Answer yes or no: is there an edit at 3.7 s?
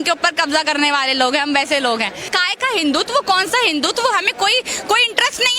no